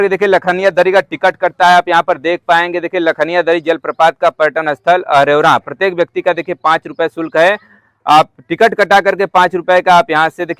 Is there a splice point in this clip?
no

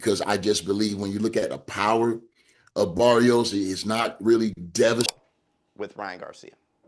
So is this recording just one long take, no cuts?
no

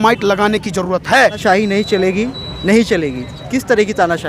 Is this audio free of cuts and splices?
no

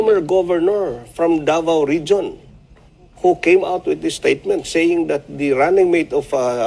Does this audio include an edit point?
no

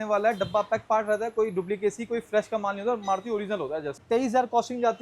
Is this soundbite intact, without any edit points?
no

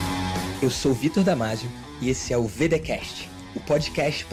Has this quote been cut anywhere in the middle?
no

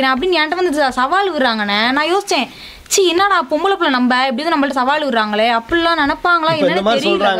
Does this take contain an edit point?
no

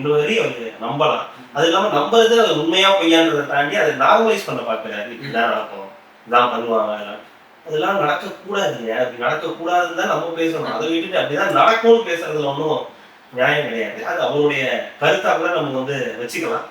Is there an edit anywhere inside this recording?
no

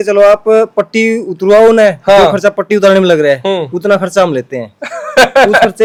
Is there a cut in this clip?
no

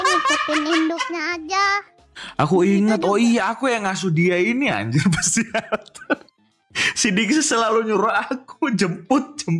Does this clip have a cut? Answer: yes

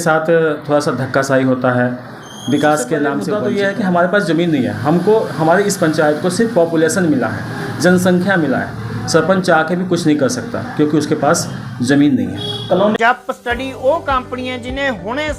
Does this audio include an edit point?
yes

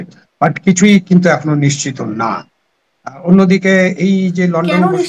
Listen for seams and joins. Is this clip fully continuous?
yes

